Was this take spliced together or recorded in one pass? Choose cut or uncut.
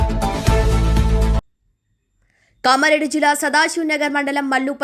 cut